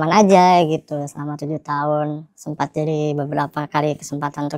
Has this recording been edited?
no; 0 cuts

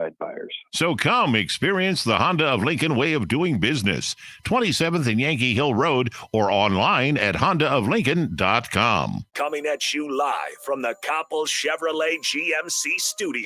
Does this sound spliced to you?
yes; 1 cut; at 9.2 s

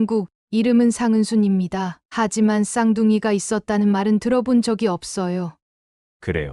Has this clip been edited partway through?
yes; 1 cut; at 5.6 s

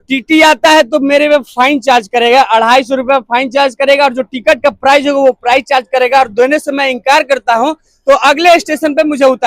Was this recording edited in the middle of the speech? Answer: no; 0 cuts

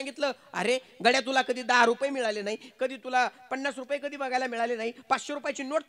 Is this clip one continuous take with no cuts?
yes; 0 cuts

